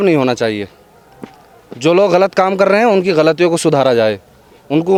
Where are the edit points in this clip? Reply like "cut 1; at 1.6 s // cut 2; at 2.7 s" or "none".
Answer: none

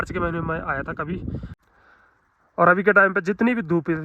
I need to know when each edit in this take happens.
cut 1; at 1.5 s

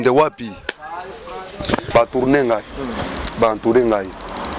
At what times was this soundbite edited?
cut 1; at 1.9 s

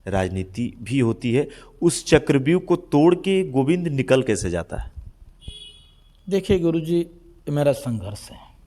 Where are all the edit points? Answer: none

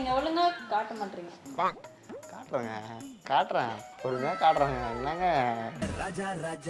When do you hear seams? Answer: cut 1; at 5.7 s

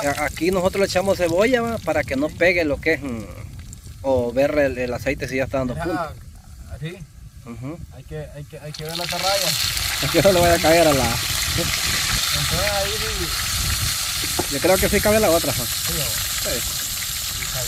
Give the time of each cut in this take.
none

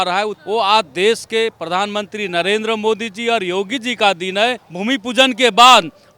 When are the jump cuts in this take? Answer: cut 1; at 4.7 s

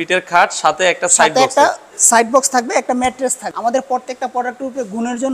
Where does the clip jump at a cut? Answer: cut 1; at 3.5 s

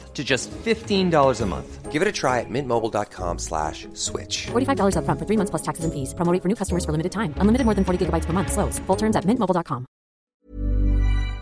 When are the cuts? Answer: cut 1; at 10.3 s

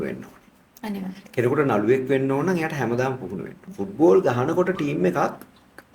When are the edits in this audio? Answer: cut 1; at 3.6 s

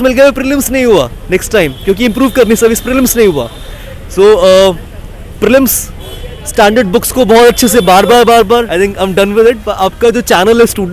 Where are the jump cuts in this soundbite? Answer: cut 1; at 8.7 s

